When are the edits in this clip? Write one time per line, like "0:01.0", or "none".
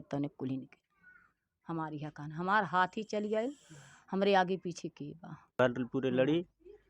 0:05.6